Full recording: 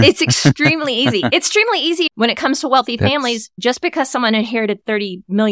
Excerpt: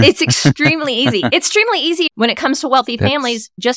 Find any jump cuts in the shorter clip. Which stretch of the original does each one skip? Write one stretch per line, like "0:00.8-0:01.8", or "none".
none